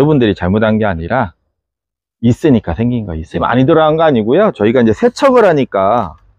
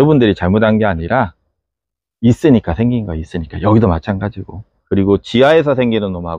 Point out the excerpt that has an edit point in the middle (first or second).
first